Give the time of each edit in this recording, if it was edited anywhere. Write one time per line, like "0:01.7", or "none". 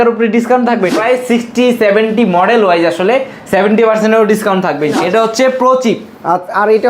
0:00.9
0:05.0